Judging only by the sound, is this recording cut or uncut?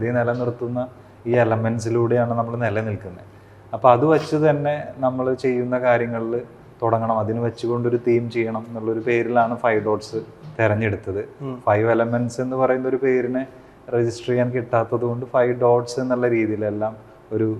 uncut